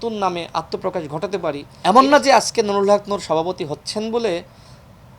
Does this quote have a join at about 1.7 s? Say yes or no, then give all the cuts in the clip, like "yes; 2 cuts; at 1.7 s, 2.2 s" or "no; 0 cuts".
yes; 1 cut; at 1.7 s